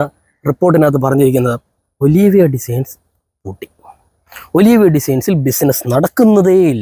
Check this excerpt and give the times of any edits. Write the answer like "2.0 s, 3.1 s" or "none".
none